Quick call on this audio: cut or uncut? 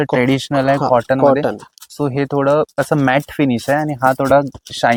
uncut